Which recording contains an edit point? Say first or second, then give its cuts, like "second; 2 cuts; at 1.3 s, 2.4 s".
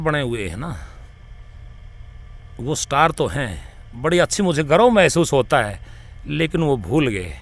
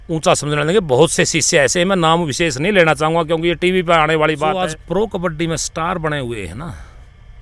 second; 1 cut; at 4.6 s